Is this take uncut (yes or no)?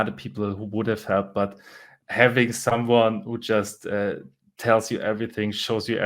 no